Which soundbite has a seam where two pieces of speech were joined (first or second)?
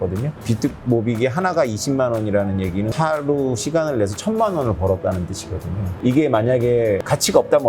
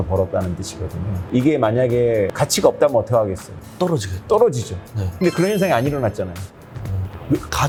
first